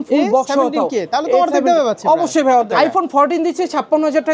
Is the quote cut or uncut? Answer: cut